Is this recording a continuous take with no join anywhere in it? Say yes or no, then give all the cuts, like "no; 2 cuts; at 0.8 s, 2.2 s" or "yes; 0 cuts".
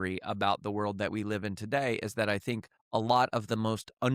no; 1 cut; at 2.7 s